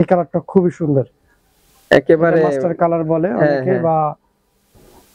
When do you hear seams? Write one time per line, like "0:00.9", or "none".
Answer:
none